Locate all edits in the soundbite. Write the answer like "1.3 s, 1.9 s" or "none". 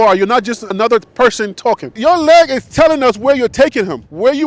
1.9 s

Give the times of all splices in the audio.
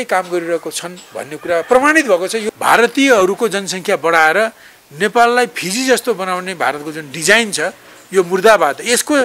2.4 s

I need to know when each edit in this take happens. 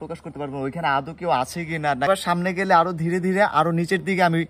2.1 s

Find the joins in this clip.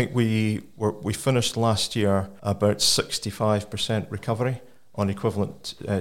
2.3 s

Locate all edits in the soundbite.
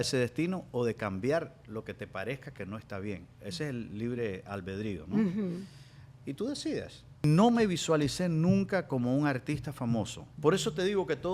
7.2 s, 10.2 s

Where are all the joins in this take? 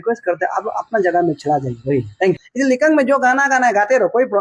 2.5 s

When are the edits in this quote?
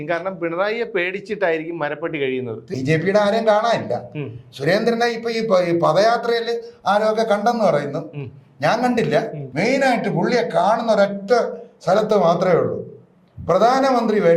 2.6 s, 9.4 s

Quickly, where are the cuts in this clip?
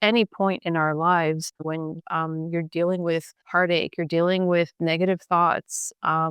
1.5 s, 3.4 s

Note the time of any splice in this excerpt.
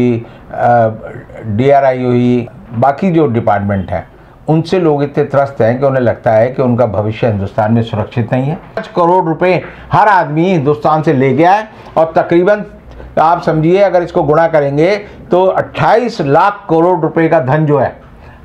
2.6 s, 8.9 s

